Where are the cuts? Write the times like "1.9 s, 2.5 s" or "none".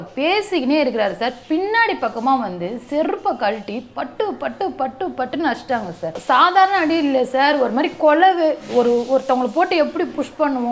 6.1 s